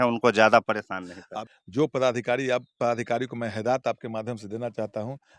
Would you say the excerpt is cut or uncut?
cut